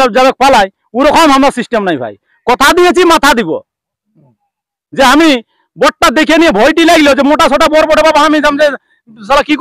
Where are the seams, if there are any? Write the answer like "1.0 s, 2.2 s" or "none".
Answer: none